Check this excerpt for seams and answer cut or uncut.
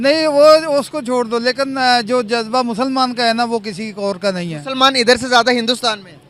uncut